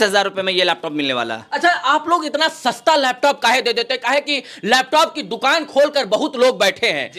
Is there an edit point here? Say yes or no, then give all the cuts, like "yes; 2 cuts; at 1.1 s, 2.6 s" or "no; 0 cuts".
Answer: no; 0 cuts